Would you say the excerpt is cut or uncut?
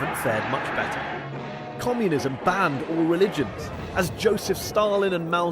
cut